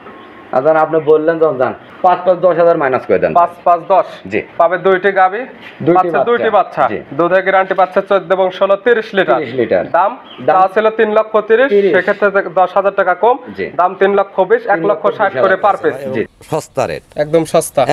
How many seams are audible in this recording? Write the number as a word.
two